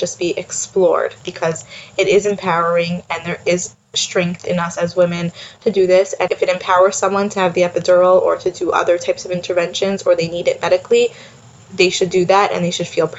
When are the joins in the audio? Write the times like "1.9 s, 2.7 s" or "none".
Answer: 1.2 s, 6.2 s